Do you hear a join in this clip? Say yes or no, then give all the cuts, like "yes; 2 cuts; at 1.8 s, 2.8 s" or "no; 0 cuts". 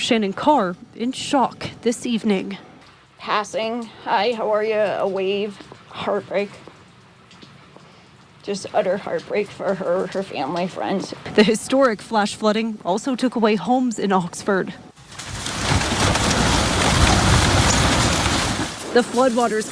yes; 1 cut; at 17.5 s